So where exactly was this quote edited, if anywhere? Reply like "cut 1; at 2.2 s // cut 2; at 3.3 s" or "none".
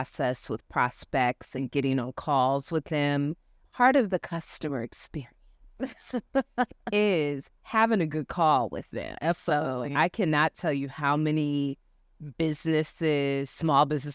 cut 1; at 3.6 s